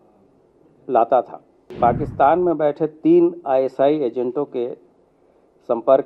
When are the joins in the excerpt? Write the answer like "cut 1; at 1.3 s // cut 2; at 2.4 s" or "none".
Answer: cut 1; at 1.7 s